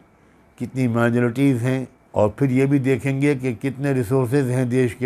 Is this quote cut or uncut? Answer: cut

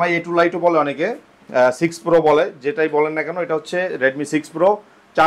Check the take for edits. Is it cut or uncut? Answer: uncut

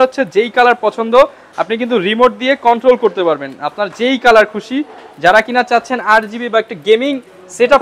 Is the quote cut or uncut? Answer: uncut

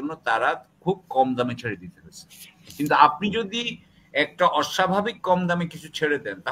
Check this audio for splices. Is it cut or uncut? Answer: uncut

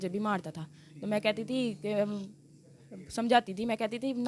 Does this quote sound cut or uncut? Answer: uncut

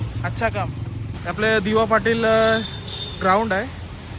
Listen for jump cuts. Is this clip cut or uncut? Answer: cut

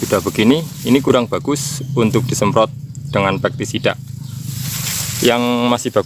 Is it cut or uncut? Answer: uncut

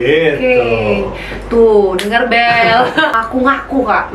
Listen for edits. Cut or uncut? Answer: cut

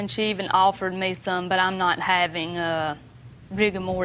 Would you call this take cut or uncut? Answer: uncut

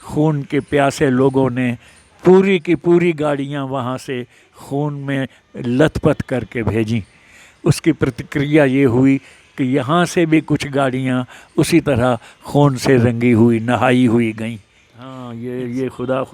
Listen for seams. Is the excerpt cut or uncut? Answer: cut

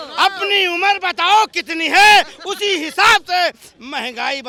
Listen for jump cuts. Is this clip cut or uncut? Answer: uncut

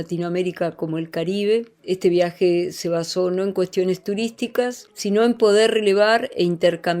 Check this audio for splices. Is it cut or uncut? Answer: cut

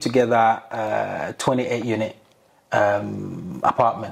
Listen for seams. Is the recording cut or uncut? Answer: uncut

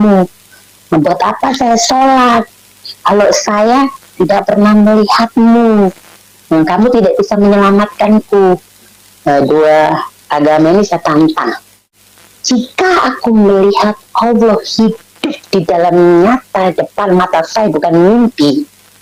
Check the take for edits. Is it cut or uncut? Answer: uncut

